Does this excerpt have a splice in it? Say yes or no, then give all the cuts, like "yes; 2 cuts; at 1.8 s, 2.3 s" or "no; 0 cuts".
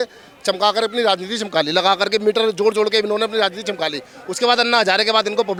no; 0 cuts